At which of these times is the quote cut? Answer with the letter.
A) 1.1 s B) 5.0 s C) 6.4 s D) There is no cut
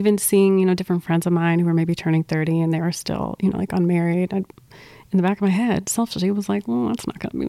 D